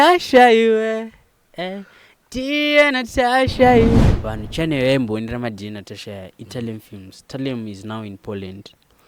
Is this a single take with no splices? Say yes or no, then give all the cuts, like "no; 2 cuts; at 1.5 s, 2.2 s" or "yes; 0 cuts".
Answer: no; 1 cut; at 4.0 s